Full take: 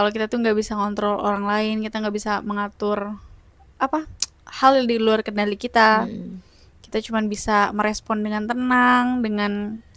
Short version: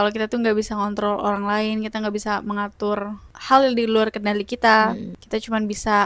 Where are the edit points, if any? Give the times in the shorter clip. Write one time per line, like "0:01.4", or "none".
0:03.3
0:05.1

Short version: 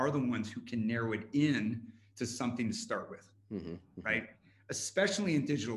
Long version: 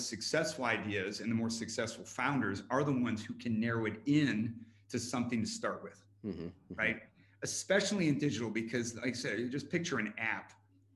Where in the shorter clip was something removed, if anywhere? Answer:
none

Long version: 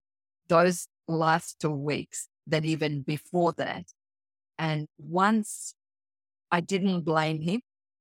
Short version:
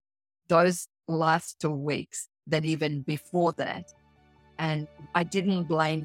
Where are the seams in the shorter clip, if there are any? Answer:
0:04.9

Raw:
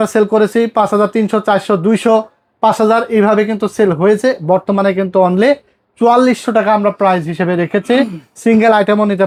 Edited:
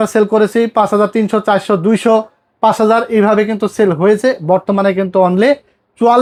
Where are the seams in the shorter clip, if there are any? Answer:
none

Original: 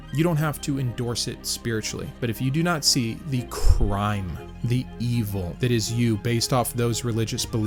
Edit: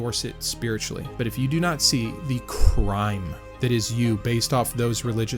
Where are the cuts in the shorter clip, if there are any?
0:03.5

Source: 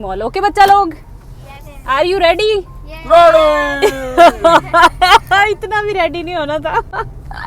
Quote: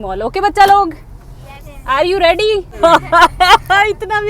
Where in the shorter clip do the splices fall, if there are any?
0:02.8

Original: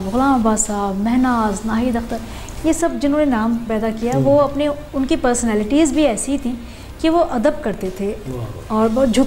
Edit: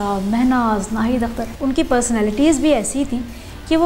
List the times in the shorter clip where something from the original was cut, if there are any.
0:01.5

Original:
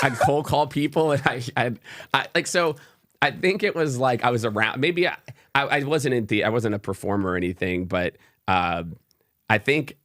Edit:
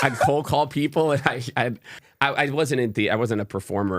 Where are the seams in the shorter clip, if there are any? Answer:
0:01.9

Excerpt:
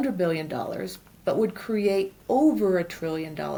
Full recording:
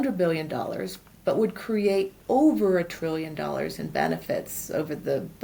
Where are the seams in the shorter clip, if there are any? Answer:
none

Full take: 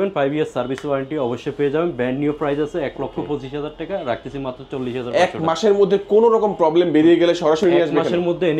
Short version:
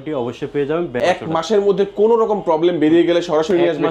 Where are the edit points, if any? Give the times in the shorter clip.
0:01.0

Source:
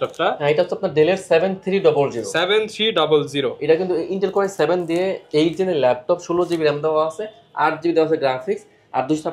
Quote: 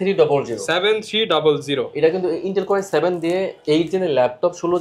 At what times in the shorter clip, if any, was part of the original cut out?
none

